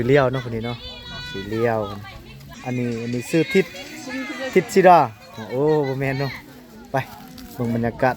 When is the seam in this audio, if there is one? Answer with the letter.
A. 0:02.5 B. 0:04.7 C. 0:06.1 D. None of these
A